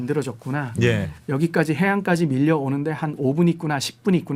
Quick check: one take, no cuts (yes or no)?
yes